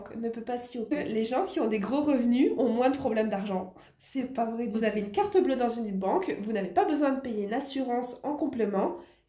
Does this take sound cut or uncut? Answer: cut